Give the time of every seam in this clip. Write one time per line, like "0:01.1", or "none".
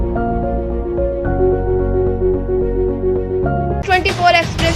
0:03.8